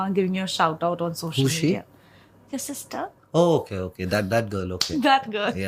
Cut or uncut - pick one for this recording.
uncut